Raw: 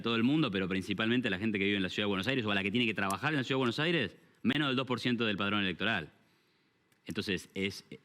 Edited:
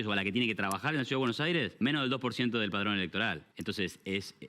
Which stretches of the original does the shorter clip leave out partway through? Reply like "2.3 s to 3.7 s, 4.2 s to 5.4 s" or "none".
4.3 s to 4.5 s, 6.1 s to 7.0 s